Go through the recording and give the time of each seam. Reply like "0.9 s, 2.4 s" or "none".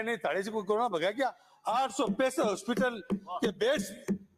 1.5 s